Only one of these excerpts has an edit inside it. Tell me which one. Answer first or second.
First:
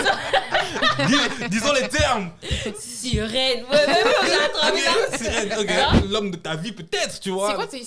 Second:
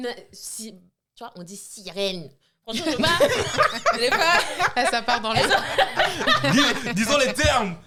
first